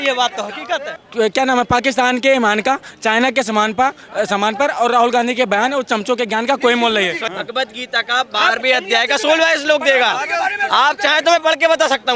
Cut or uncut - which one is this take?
cut